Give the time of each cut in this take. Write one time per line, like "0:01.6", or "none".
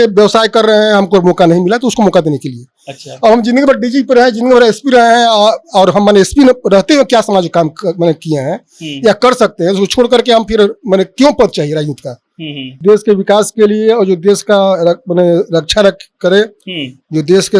0:12.7